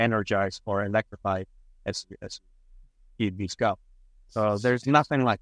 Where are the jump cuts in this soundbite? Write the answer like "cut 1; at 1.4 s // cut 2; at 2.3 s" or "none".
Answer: none